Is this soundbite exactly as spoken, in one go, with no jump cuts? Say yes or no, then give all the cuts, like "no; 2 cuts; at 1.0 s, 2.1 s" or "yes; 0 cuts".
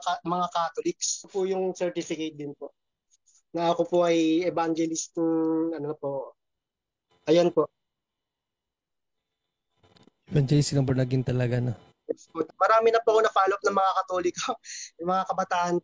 no; 2 cuts; at 1.3 s, 12.4 s